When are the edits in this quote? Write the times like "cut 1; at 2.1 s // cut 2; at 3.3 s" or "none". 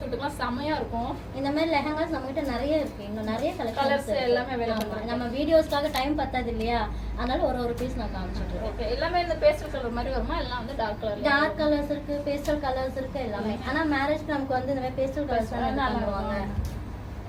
none